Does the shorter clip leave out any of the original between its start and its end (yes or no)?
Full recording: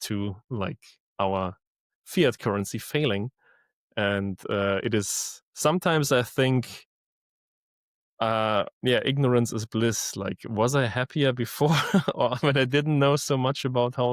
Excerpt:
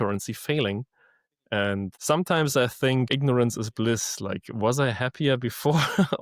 yes